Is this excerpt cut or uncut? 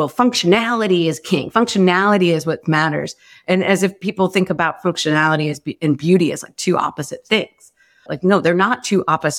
cut